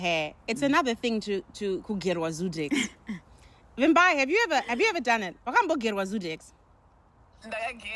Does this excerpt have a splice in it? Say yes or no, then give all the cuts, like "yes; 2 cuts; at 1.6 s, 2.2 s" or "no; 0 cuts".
no; 0 cuts